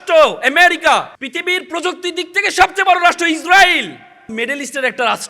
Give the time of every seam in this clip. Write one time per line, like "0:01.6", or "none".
0:01.2
0:04.3